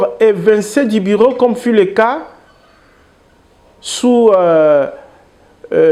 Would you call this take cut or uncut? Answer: uncut